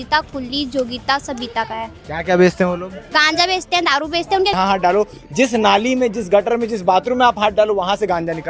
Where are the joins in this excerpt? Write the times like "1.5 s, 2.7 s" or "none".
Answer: 4.5 s